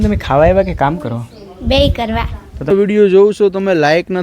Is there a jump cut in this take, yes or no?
yes